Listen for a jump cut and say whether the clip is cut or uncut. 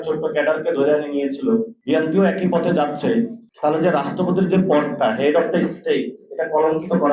cut